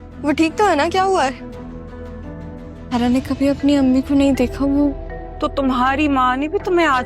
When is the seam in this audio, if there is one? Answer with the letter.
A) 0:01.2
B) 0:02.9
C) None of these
B